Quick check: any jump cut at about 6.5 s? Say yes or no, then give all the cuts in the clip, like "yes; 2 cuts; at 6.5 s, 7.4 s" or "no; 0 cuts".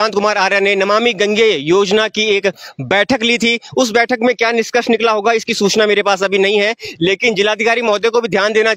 no; 0 cuts